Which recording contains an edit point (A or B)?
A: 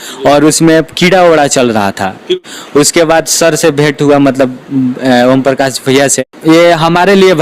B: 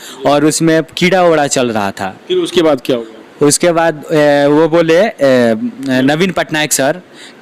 A